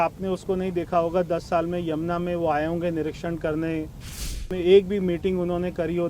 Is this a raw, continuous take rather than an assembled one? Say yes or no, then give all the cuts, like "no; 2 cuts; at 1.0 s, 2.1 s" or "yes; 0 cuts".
no; 1 cut; at 4.5 s